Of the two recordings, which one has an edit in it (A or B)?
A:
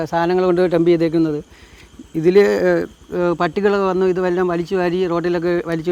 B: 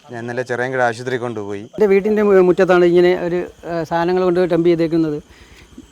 B